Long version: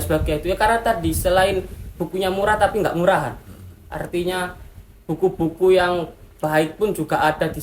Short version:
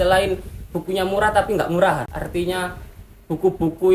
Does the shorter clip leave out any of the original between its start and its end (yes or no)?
yes